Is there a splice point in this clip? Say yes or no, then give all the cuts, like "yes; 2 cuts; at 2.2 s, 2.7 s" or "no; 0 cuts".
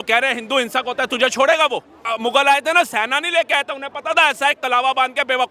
yes; 1 cut; at 2.1 s